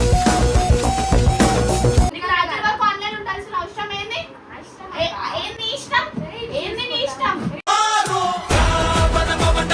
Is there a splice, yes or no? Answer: yes